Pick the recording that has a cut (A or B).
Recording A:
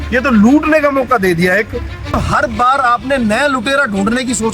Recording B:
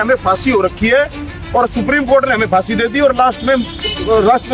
A